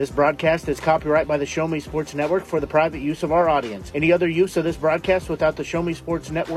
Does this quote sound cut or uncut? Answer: uncut